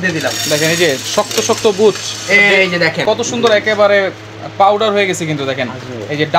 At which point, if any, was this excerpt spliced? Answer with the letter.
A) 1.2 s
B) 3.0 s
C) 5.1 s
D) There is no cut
B